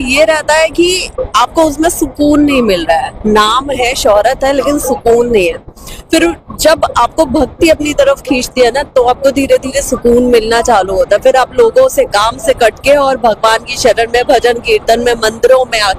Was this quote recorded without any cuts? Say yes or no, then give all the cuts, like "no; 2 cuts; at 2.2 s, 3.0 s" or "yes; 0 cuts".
yes; 0 cuts